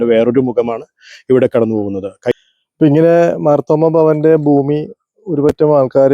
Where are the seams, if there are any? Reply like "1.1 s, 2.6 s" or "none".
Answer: 2.3 s